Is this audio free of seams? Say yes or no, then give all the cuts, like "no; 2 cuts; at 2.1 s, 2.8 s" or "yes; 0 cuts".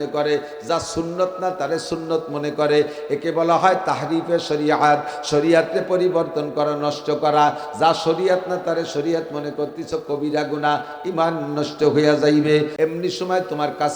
no; 1 cut; at 12.7 s